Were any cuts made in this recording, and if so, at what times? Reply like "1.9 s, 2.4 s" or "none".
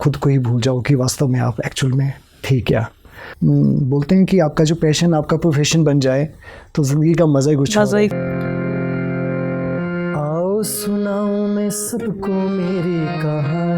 3.2 s, 8.1 s